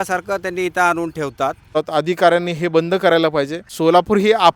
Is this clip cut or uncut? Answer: cut